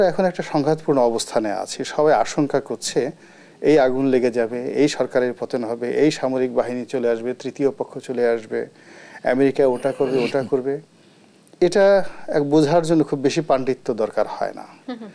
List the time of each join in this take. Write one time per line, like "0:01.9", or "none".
none